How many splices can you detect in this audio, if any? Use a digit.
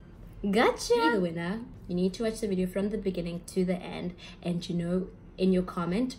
1